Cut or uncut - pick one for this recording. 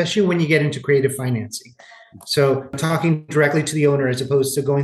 cut